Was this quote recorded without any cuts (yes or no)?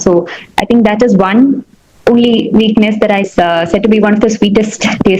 no